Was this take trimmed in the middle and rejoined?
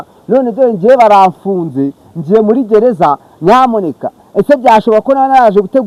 no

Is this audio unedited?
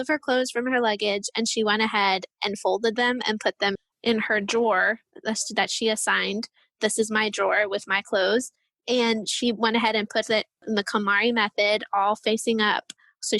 no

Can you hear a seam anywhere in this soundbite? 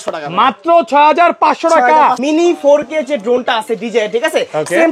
yes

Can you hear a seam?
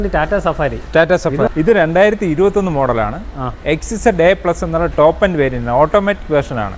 yes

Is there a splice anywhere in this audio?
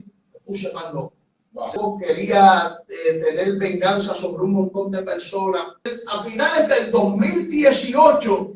yes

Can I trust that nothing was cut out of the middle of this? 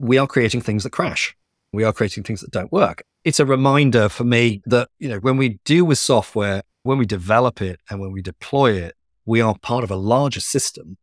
no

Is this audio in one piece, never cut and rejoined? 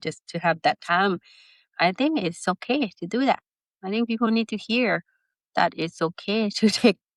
yes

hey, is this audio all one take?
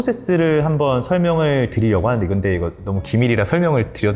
yes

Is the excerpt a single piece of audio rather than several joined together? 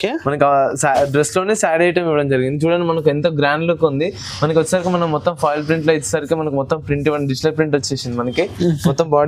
yes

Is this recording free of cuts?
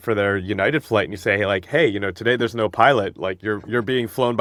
yes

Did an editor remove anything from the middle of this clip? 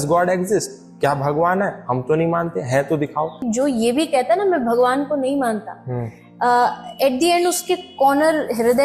yes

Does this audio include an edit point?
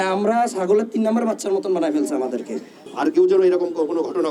yes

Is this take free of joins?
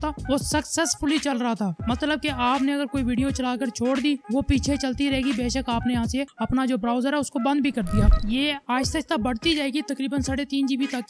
no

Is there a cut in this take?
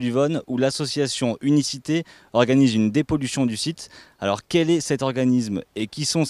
no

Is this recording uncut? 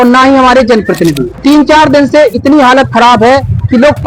no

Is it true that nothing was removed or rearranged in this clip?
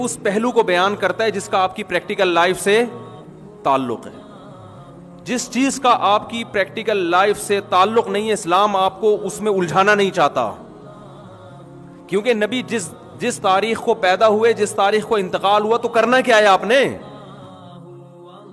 no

